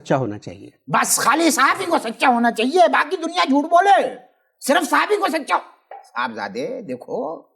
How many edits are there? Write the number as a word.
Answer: zero